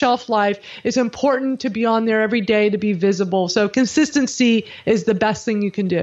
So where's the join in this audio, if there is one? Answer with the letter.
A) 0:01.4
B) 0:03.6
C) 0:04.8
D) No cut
D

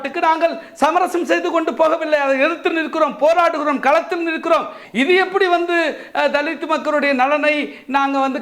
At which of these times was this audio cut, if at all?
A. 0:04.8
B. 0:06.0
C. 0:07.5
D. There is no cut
A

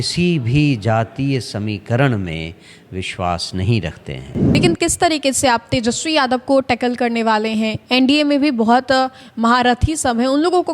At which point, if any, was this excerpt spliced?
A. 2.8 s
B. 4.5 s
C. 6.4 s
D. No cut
B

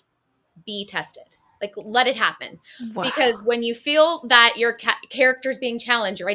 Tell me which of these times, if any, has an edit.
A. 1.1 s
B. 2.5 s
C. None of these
C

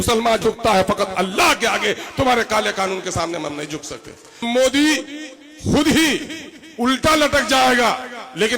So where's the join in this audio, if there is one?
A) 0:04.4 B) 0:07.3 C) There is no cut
A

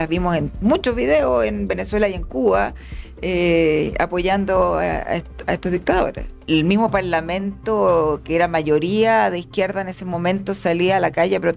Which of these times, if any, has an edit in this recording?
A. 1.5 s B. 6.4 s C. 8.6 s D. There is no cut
B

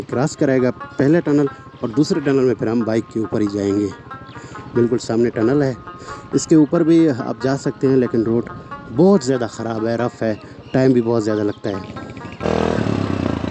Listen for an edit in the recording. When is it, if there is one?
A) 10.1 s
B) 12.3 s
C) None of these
B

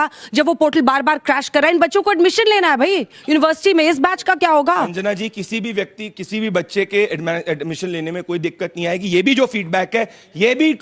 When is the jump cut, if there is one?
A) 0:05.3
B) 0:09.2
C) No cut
C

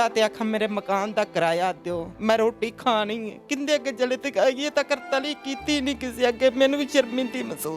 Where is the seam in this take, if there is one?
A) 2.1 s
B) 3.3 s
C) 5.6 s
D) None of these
A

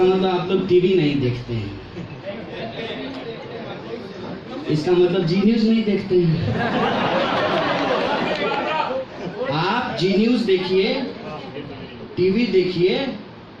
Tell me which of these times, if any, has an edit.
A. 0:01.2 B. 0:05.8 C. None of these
C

